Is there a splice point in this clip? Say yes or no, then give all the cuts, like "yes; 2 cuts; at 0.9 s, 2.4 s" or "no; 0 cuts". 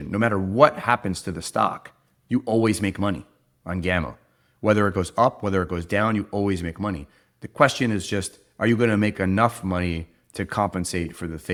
no; 0 cuts